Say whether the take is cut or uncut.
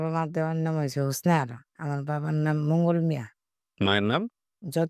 cut